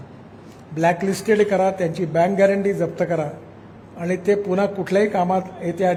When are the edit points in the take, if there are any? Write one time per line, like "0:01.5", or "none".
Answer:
none